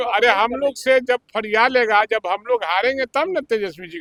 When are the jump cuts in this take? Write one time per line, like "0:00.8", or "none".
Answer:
none